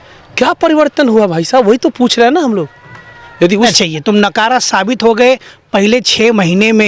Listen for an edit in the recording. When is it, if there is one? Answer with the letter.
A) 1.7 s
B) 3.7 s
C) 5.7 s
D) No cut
B